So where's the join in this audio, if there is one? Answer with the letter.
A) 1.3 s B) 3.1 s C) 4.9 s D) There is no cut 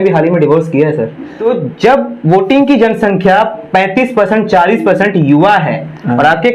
A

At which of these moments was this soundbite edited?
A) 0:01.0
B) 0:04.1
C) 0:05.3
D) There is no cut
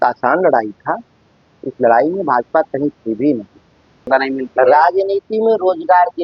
B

